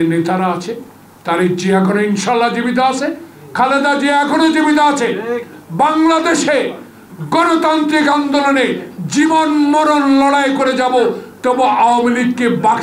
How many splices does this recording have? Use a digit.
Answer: 0